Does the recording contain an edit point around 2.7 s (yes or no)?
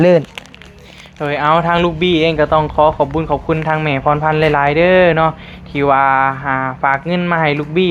no